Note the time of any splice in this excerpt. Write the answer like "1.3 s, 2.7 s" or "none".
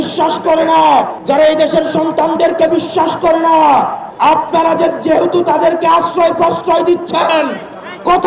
1.2 s, 4.0 s

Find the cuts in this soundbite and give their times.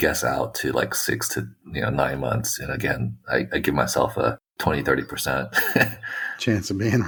none

